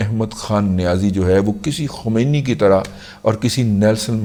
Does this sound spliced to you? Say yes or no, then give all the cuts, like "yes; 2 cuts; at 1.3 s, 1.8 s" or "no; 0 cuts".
no; 0 cuts